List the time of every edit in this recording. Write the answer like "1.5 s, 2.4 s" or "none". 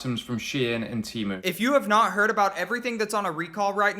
1.4 s